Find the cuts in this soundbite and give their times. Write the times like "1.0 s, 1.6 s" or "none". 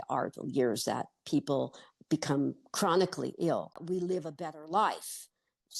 3.8 s